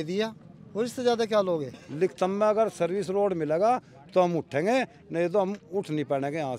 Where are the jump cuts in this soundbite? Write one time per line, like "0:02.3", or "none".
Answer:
0:01.8